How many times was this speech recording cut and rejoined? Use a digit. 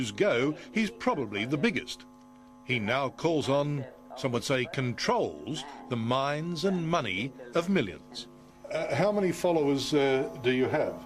1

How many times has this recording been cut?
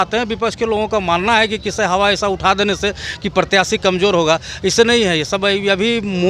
0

